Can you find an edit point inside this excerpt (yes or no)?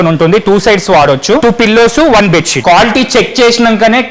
yes